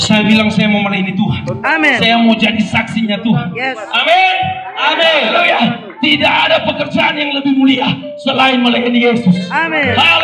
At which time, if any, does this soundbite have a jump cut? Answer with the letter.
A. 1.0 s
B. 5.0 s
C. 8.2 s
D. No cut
D